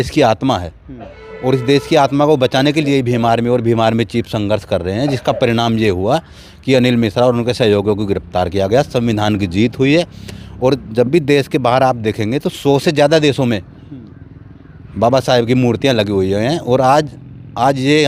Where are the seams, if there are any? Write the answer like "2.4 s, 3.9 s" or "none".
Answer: none